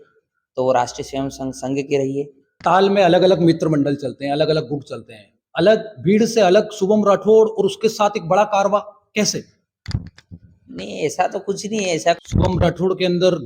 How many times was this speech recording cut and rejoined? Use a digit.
2